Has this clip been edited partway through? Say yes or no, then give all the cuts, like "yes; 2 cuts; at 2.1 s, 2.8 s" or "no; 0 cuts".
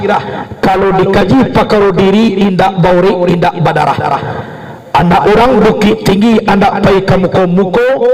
no; 0 cuts